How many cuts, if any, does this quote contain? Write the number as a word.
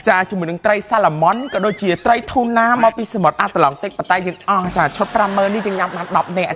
zero